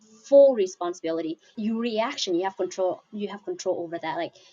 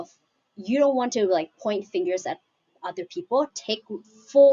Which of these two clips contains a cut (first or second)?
first